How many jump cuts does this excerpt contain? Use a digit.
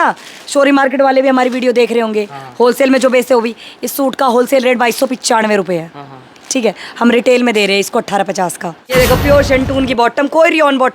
1